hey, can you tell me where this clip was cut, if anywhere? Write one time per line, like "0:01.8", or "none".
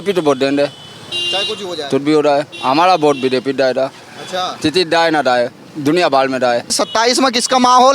0:06.7

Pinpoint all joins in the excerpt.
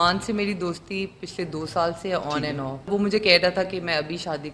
0:02.9

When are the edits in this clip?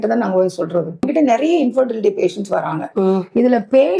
0:01.0

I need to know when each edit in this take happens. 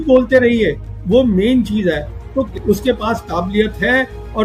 0:02.5

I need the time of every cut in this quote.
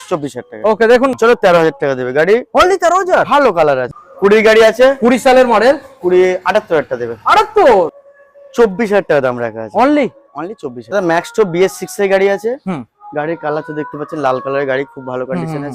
0:01.1
0:03.9
0:08.0
0:10.8

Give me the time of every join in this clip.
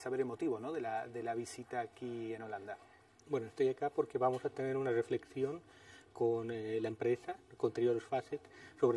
0:01.6

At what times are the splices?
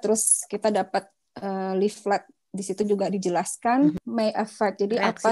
0:04.0

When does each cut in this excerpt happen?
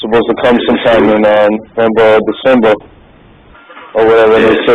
none

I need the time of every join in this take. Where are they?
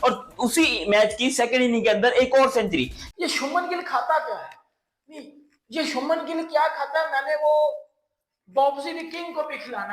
0:03.0

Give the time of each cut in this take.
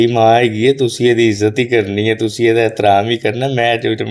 none

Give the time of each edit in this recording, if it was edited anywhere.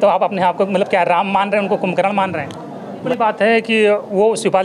0:03.0

